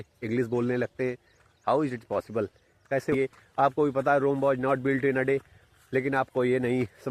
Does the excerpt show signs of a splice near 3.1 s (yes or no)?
yes